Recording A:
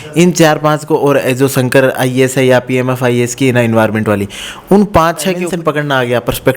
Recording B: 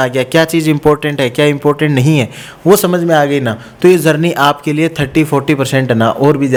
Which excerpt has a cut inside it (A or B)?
A